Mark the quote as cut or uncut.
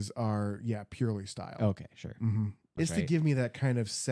cut